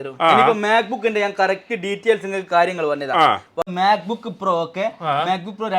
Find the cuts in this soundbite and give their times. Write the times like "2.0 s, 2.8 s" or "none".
3.6 s